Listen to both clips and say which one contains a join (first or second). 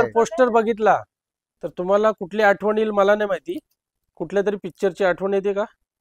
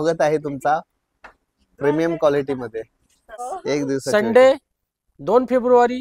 second